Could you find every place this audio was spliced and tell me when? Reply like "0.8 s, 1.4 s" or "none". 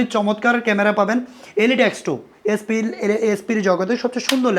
none